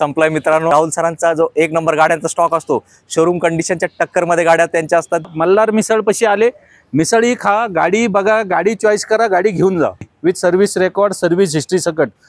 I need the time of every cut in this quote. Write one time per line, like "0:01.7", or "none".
0:00.7
0:05.3
0:10.1